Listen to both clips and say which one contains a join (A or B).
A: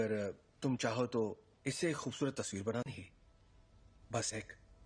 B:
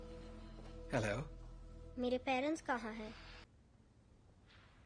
B